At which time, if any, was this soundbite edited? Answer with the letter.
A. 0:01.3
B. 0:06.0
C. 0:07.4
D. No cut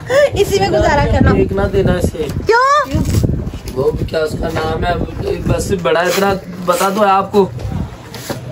C